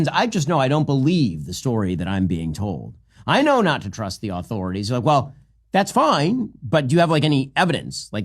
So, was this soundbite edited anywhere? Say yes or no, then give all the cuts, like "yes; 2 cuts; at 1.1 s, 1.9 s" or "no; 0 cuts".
yes; 1 cut; at 2.9 s